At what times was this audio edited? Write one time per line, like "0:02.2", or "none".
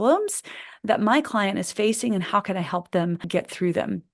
0:03.2